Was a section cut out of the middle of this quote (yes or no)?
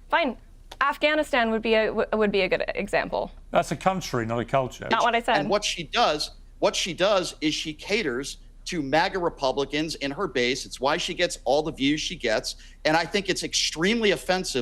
yes